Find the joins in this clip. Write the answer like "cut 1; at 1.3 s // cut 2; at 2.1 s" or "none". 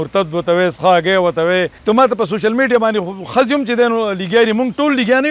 cut 1; at 1.7 s

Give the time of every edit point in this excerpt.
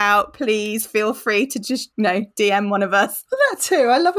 cut 1; at 1.9 s // cut 2; at 3.2 s

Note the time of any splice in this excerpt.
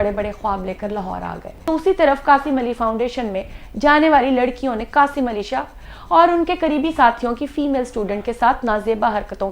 cut 1; at 1.7 s

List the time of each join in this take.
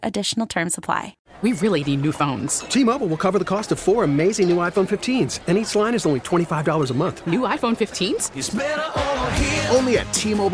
cut 1; at 1.2 s

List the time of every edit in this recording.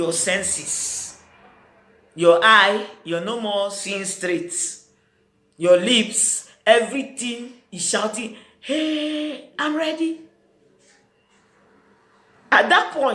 none

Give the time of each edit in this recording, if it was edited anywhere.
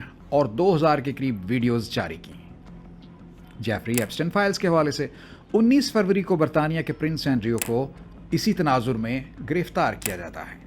none

